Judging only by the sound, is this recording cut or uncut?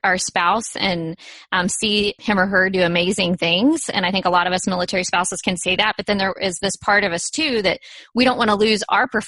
uncut